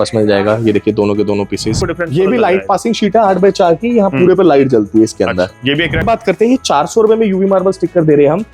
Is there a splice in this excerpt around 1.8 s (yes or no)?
yes